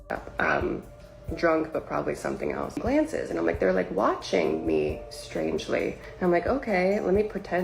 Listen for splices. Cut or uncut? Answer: cut